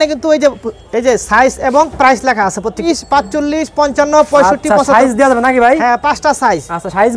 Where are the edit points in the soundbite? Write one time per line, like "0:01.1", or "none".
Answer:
0:02.9

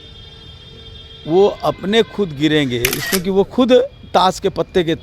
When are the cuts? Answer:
0:03.0

